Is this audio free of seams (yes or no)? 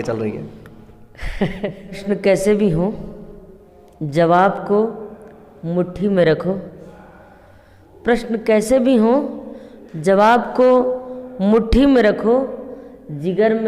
no